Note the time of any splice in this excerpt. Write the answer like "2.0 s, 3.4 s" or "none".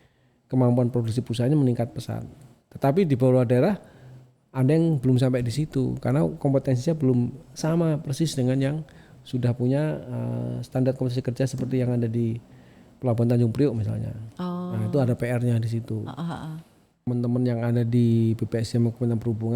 17.1 s

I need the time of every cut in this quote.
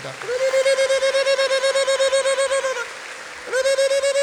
none

